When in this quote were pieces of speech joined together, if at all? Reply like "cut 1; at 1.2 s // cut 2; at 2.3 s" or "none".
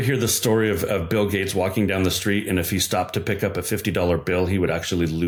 none